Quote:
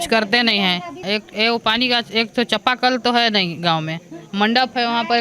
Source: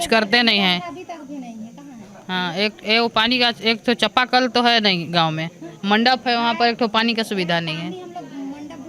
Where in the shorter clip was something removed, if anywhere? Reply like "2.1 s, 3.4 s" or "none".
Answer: 1.0 s